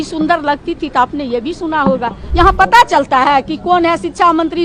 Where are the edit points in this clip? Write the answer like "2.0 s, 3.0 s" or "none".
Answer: 2.2 s